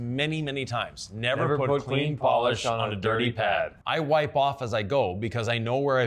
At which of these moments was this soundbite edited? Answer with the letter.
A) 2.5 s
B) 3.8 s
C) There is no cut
B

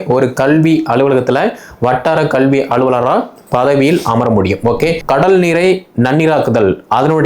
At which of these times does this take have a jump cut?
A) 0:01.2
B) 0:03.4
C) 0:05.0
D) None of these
C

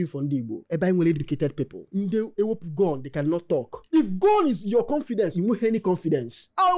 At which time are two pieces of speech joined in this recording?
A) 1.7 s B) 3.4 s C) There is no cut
C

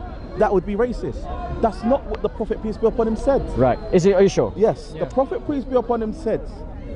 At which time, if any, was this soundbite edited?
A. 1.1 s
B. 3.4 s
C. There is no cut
C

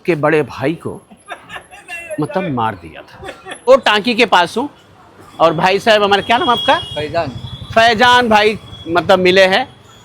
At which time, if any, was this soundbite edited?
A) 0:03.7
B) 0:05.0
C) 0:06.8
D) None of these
A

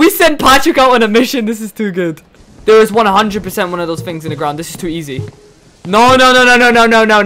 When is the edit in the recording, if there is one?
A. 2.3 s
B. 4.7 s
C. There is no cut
A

